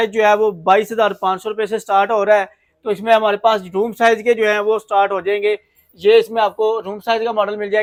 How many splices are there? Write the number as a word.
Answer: zero